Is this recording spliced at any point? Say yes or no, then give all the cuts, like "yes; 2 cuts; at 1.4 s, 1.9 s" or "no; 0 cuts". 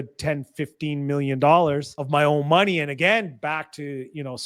yes; 1 cut; at 1.9 s